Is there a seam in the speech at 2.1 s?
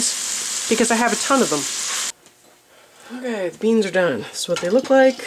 yes; 1 cut; at 2.1 s

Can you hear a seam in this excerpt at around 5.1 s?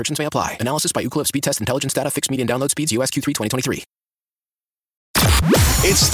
yes; 1 cut; at 5.1 s

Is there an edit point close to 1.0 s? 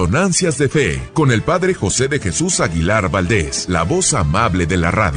yes; 2 cuts; at 1.0 s, 3.6 s

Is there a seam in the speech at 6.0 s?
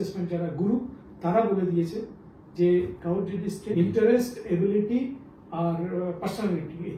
no; 1 cut; at 3.7 s

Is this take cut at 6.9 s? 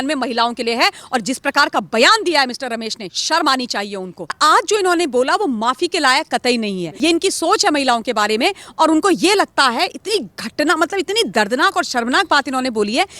yes; 2 cuts; at 4.4 s, 6.9 s

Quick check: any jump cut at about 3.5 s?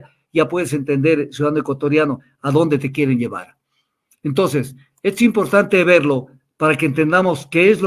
no; 0 cuts

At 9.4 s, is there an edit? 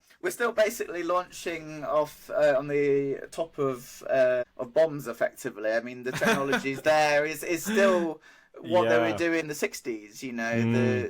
yes; 2 cuts; at 4.6 s, 9.4 s

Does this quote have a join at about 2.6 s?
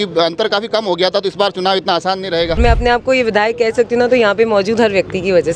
yes; 1 cut; at 2.6 s

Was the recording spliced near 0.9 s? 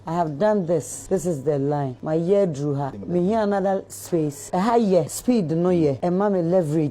yes; 6 cuts; at 0.9 s, 2.0 s, 3.0 s, 4.4 s, 5.1 s, 6.0 s

